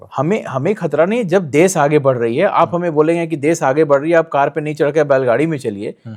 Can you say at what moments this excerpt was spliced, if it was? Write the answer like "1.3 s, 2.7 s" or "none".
none